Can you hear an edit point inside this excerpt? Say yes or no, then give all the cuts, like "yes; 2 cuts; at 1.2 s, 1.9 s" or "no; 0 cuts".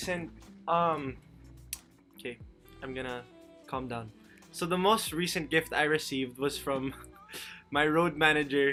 no; 0 cuts